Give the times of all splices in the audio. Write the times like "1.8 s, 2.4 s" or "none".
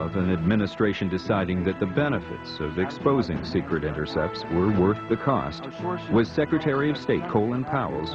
3.3 s